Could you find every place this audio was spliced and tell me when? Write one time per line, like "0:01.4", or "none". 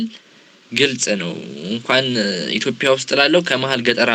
none